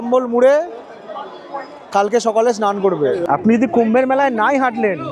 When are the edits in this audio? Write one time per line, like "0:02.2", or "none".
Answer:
0:03.2